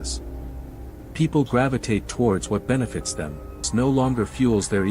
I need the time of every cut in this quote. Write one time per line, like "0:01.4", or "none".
0:03.7